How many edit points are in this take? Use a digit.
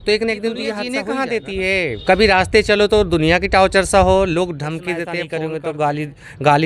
2